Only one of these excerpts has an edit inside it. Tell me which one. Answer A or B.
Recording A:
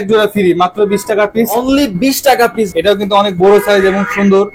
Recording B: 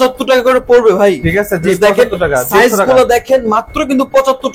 A